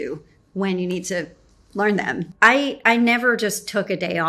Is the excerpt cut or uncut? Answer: cut